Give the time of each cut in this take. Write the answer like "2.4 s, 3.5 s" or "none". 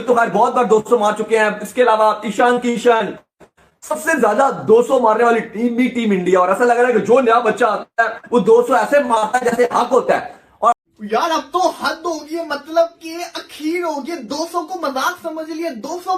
10.7 s